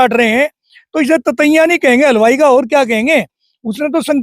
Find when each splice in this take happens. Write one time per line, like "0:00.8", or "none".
none